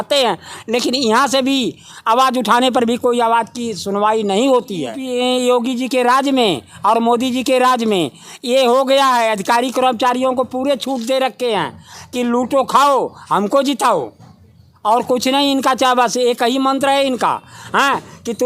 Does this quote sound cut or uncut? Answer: cut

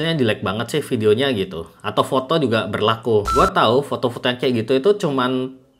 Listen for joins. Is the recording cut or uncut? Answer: cut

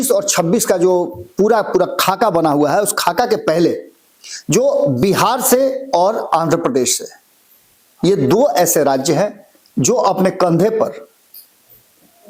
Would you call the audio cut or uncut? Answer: uncut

